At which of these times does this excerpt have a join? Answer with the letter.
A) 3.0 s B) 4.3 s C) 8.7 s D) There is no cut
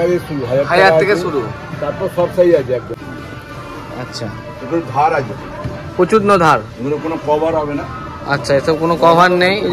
A